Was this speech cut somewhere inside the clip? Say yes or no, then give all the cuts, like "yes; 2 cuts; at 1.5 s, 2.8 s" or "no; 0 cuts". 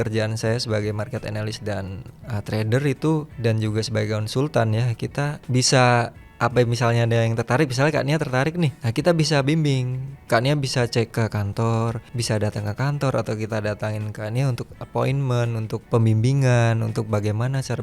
yes; 7 cuts; at 3.3 s, 5.4 s, 6.2 s, 8.8 s, 11.1 s, 12.1 s, 15.8 s